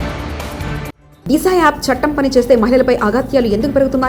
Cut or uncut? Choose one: uncut